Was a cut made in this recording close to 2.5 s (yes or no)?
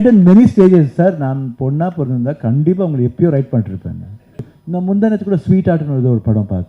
no